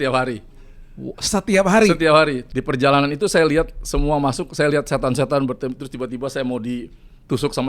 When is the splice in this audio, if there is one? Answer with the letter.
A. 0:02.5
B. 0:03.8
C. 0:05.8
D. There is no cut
A